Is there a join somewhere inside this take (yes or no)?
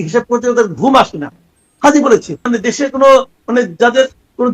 yes